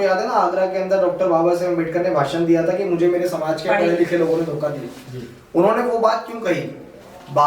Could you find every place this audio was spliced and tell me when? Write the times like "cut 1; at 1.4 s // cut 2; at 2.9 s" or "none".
none